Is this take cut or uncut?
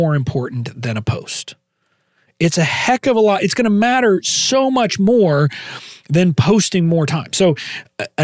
uncut